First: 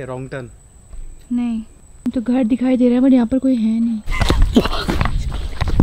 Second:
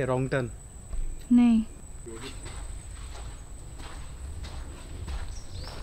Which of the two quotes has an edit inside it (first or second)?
first